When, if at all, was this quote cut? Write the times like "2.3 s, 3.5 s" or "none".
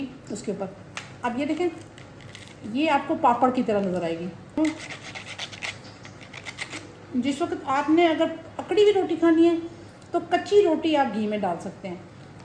4.6 s